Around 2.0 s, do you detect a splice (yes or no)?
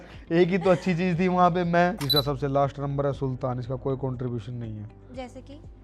yes